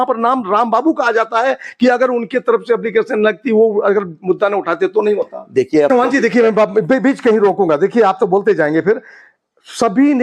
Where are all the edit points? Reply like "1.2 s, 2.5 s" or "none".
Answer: 5.9 s